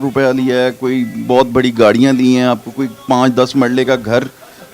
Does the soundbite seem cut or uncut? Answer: uncut